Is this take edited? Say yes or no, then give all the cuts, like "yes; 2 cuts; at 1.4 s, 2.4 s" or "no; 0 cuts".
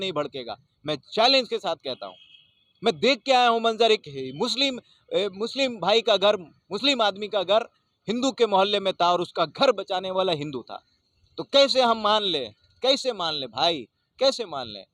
no; 0 cuts